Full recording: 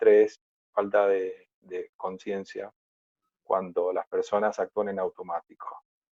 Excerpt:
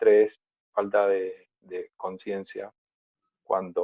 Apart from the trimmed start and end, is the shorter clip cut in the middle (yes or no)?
no